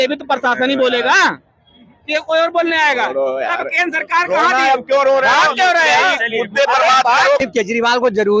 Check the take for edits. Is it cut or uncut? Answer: cut